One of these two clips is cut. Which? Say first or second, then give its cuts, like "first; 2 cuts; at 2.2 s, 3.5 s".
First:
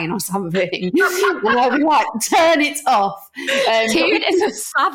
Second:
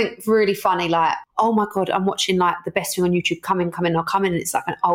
second; 1 cut; at 1.2 s